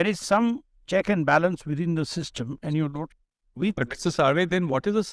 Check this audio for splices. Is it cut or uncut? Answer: cut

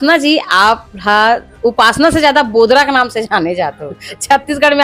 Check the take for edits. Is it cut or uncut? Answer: uncut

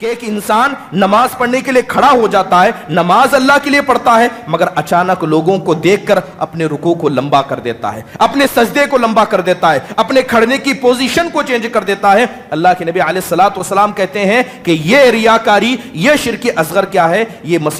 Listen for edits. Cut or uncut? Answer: uncut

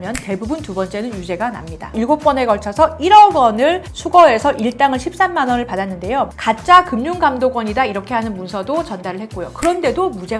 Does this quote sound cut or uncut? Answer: cut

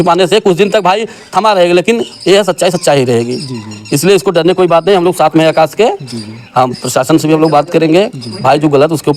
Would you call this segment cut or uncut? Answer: uncut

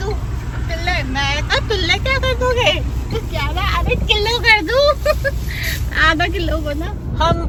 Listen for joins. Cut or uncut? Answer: uncut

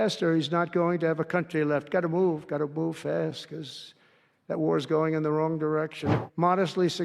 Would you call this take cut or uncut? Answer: cut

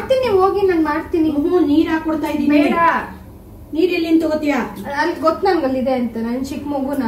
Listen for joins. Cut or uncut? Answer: uncut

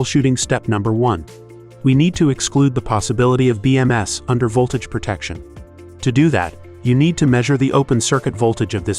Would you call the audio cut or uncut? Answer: cut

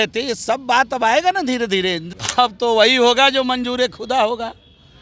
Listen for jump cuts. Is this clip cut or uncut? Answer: cut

